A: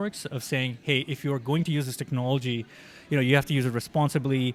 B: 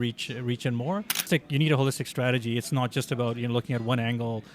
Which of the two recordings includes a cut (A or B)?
B